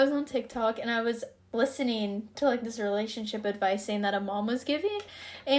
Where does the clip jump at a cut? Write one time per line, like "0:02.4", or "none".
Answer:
0:01.3